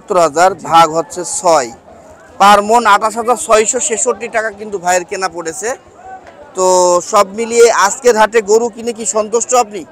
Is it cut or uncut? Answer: uncut